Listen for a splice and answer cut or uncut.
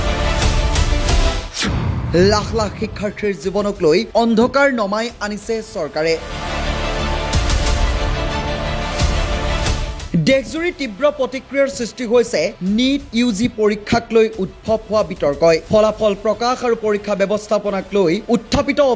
cut